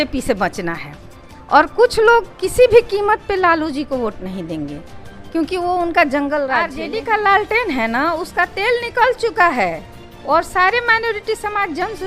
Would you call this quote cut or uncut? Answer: cut